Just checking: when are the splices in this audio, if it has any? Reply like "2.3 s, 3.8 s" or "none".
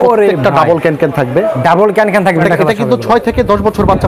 2.4 s